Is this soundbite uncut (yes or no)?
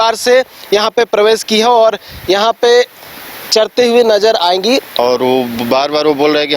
no